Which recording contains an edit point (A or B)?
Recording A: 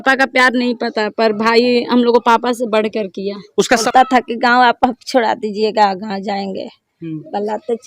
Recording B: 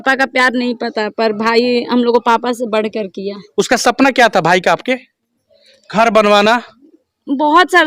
A